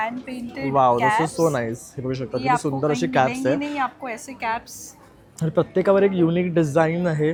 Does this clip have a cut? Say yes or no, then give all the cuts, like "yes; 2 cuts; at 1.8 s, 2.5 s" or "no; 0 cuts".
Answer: no; 0 cuts